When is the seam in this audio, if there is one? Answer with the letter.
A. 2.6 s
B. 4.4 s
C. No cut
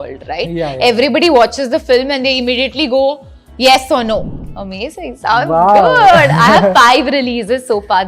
B